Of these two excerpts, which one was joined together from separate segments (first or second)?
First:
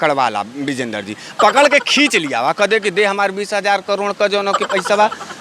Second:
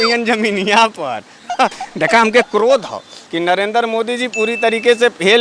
second